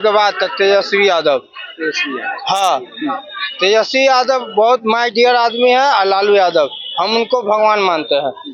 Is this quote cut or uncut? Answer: uncut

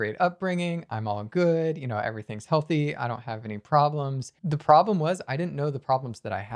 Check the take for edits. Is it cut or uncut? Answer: cut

